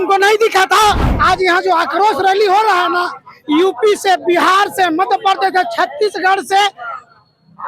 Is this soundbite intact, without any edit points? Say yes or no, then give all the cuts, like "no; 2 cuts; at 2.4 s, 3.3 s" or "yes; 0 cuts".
no; 1 cut; at 1.1 s